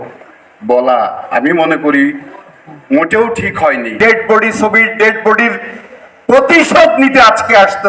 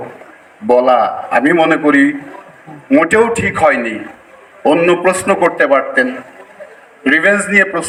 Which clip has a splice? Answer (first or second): first